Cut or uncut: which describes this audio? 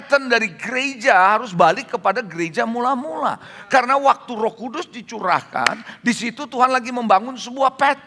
uncut